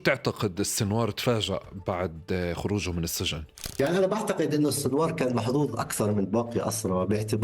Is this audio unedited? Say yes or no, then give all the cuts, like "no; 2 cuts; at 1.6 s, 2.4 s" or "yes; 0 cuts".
no; 1 cut; at 3.6 s